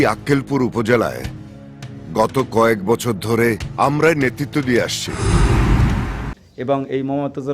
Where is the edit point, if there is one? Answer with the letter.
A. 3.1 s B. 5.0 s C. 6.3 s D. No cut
C